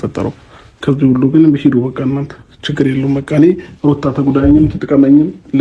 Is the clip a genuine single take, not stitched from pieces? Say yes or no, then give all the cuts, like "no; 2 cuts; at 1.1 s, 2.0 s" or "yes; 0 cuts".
yes; 0 cuts